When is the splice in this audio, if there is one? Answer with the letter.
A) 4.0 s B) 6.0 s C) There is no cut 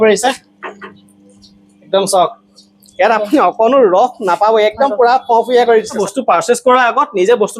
B